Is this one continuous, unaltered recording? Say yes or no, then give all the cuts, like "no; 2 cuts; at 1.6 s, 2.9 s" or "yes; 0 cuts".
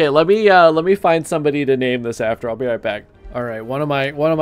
no; 1 cut; at 3.2 s